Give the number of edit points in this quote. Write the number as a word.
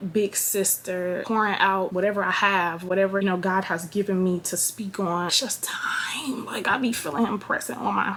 zero